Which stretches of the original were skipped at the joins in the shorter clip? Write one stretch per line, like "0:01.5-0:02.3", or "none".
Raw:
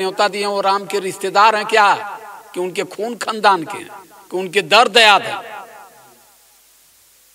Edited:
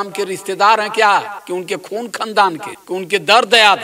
0:02.1-0:02.4
0:03.8-0:04.2